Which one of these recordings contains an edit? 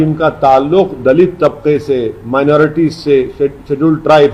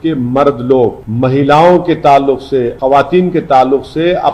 second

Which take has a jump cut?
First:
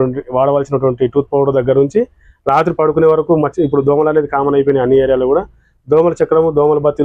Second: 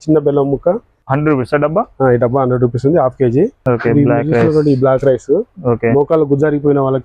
second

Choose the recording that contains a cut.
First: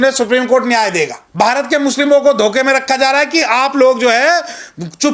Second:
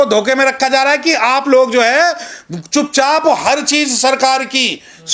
first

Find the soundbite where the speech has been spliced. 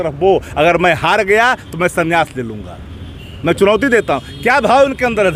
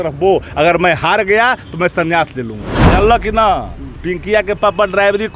second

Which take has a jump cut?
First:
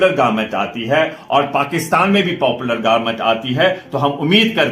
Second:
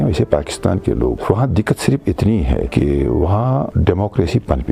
second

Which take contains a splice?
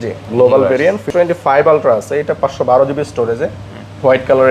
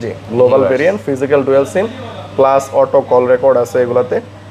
first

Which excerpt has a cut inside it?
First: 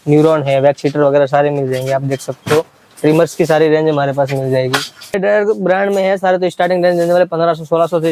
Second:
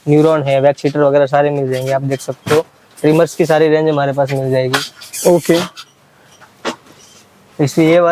first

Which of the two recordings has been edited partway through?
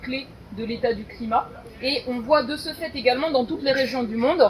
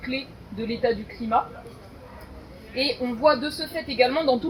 first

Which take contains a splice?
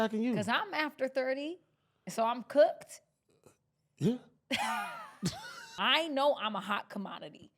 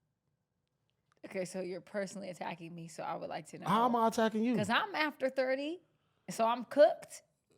first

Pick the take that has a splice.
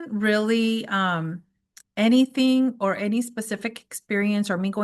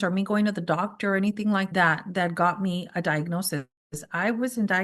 second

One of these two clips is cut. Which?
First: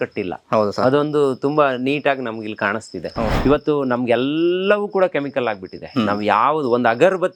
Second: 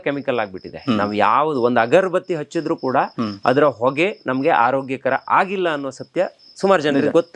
first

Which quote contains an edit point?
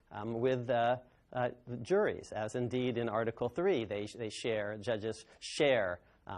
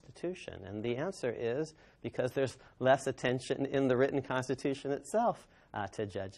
first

